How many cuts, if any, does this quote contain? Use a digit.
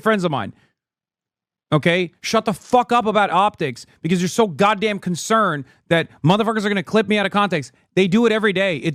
0